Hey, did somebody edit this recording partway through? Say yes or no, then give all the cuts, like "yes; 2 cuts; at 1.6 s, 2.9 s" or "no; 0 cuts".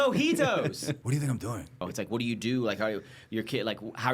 yes; 2 cuts; at 1.0 s, 1.9 s